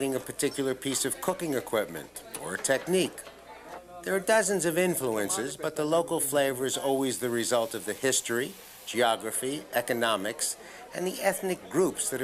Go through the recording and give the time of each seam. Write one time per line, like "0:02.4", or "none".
none